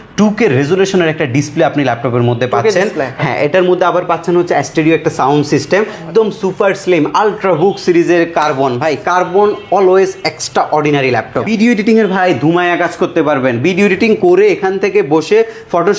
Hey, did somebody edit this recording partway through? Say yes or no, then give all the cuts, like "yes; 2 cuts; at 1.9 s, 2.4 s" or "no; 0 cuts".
yes; 2 cuts; at 6.0 s, 11.5 s